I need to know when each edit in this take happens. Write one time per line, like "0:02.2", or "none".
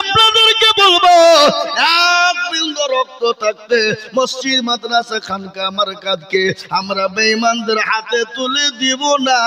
none

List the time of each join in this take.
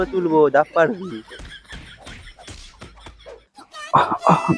none

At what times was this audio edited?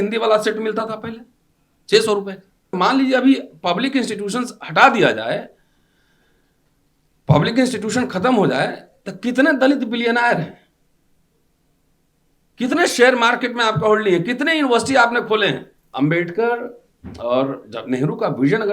0:02.7
0:15.8

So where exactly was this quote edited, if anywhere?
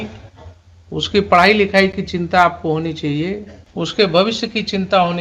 0:03.6

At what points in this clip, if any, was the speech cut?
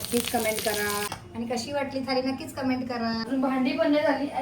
0:01.1
0:03.3

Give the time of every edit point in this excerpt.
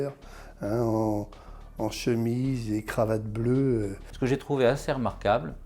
none

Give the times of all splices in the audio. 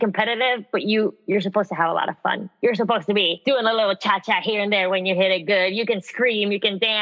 0:01.2
0:03.3

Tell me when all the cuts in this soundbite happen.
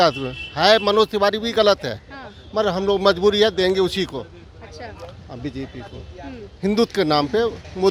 none

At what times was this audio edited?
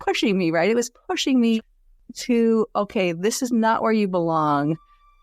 0:01.7

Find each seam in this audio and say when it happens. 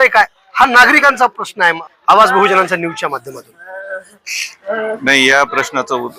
0:01.9

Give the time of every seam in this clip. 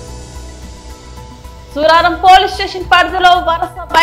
0:01.0

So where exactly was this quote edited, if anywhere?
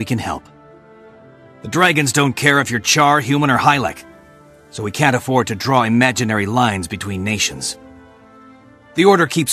0:03.2

